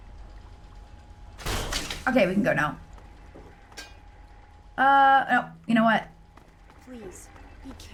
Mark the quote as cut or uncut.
uncut